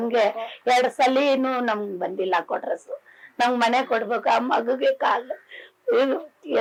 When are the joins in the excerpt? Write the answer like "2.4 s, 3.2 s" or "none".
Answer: none